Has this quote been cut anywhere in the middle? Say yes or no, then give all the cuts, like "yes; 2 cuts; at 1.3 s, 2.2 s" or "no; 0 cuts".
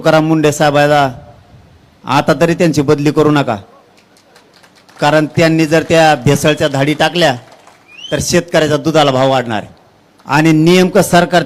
no; 0 cuts